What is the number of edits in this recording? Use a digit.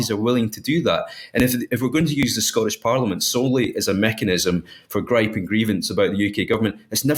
0